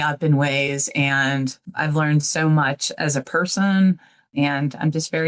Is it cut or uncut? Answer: cut